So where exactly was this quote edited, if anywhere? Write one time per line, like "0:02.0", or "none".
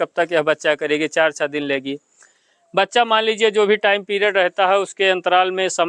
none

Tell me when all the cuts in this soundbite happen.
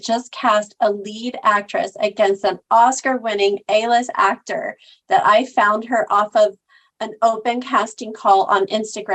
none

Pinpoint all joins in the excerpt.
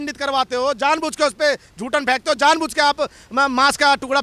none

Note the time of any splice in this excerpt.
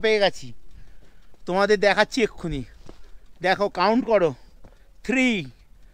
none

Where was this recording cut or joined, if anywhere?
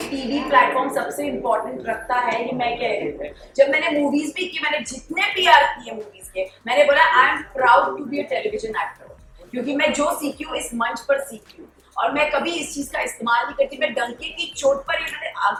none

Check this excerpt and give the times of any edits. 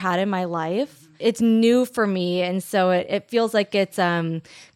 0:00.9

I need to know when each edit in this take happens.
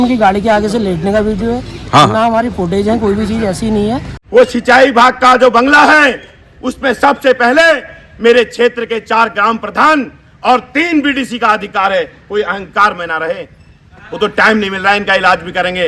0:04.1

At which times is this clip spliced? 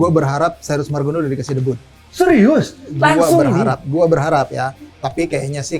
none

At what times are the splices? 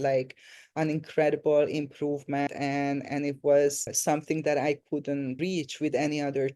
0:02.5
0:03.9
0:05.4

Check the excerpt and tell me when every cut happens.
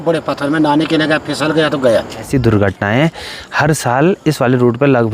0:02.2

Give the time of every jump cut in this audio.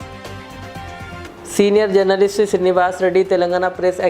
0:01.2

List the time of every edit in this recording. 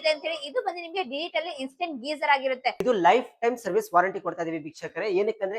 0:02.8

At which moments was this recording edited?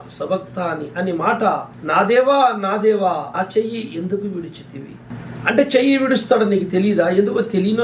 0:01.7
0:03.3
0:05.1

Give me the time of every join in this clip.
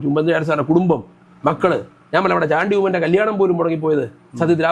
none

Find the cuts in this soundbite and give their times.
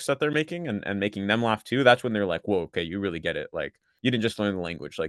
none

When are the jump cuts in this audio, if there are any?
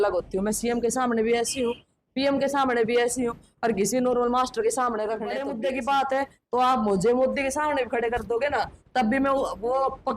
0:05.4

